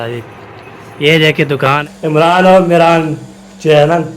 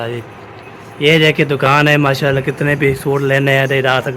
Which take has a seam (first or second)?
first